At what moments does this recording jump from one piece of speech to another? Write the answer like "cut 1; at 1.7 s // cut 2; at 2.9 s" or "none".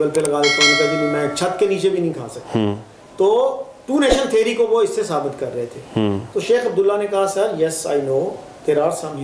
none